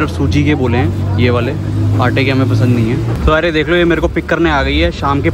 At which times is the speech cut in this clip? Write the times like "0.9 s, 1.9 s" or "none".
3.2 s

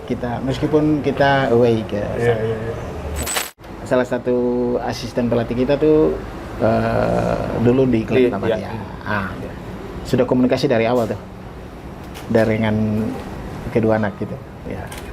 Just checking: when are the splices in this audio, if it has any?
3.3 s

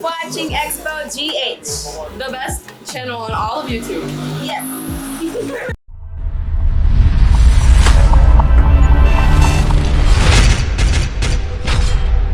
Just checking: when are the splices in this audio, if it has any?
none

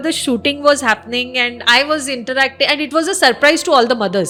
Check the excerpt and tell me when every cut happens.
none

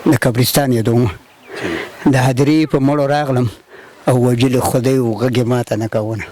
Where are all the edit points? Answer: none

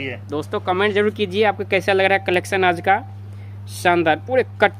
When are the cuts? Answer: none

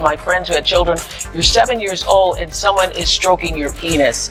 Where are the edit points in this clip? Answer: none

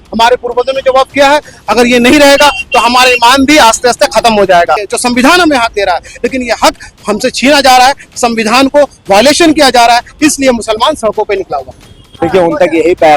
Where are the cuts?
4.8 s, 11.8 s

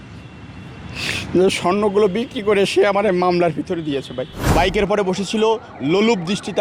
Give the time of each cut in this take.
4.4 s

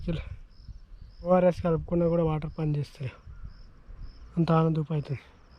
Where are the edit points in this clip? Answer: 1.3 s

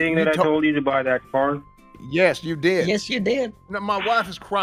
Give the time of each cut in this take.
3.6 s

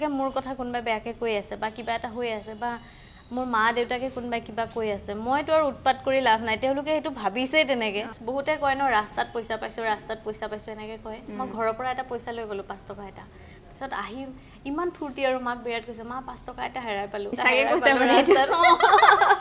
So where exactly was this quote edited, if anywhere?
8.1 s, 17.4 s

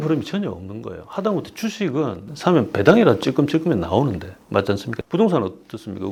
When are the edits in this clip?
none

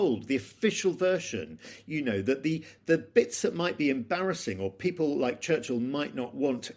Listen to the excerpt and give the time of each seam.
none

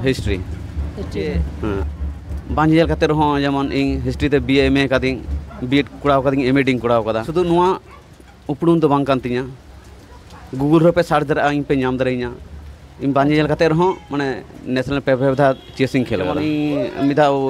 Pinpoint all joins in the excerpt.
1.8 s, 7.2 s, 16.4 s

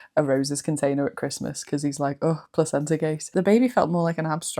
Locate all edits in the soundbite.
3.3 s

